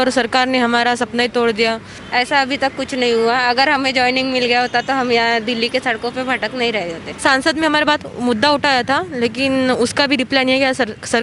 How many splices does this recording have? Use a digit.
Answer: 2